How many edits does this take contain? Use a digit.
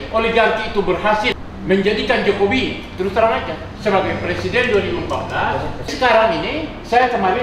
2